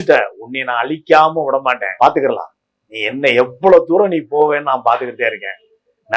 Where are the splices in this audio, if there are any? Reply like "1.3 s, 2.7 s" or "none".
1.9 s

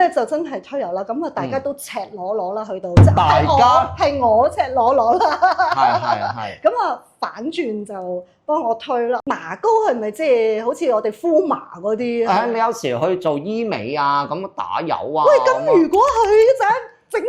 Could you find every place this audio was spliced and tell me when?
9.2 s

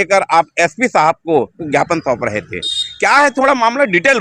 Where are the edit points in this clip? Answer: 1.5 s

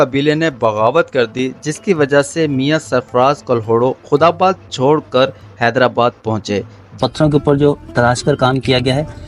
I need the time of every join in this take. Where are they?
7.0 s

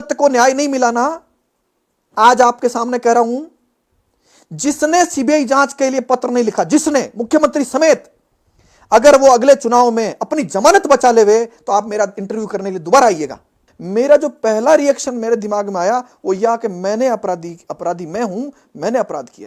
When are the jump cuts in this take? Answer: 13.7 s

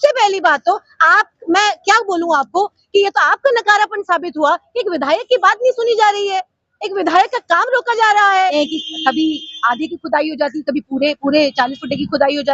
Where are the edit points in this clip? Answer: 8.4 s

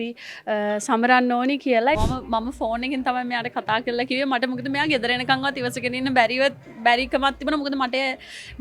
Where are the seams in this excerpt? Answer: 2.0 s

